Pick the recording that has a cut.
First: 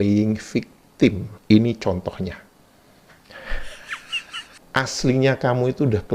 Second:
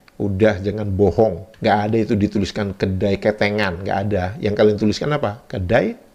first; 1 cut; at 4.5 s

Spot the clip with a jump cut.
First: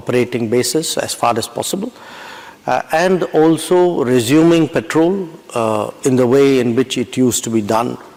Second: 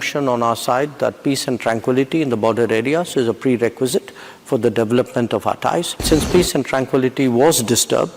second; 1 cut; at 6.0 s

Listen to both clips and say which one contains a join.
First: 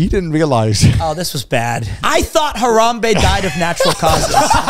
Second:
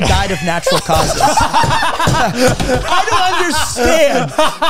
first; 1 cut; at 1.9 s

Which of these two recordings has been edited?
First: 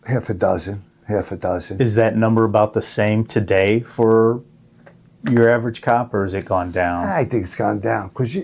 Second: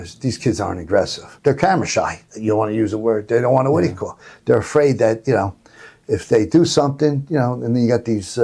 second; 1 cut; at 1.3 s

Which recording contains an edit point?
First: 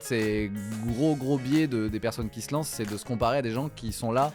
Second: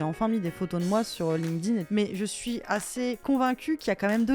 second; 2 cuts; at 1.9 s, 3.2 s

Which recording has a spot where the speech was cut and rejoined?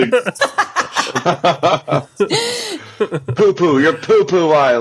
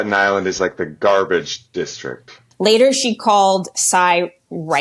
first; 1 cut; at 1.2 s

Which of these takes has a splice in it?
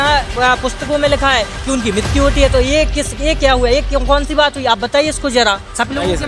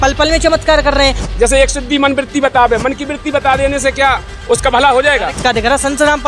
second; 2 cuts; at 1.2 s, 5.4 s

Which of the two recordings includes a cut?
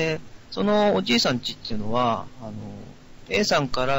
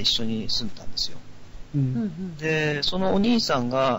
second; 1 cut; at 1.2 s

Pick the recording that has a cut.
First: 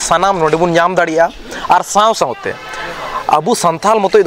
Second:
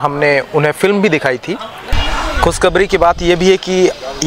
second; 1 cut; at 1.9 s

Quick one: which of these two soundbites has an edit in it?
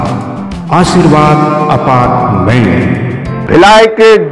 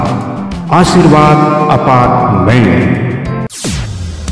first; 1 cut; at 3.4 s

